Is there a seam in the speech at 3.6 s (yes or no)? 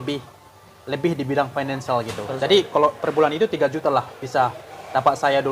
no